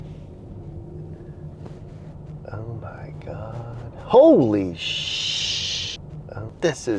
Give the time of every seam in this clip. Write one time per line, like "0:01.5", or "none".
0:05.9